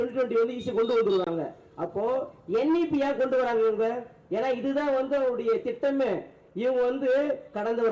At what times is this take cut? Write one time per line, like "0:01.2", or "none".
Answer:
none